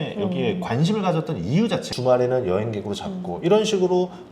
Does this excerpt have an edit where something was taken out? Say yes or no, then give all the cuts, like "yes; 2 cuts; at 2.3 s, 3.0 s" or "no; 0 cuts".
yes; 1 cut; at 1.9 s